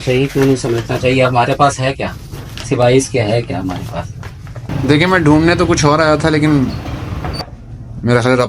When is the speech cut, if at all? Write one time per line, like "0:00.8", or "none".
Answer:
0:04.6